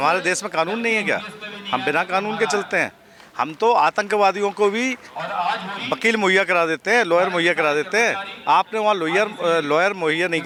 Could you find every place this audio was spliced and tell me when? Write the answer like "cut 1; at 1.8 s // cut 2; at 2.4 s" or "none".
none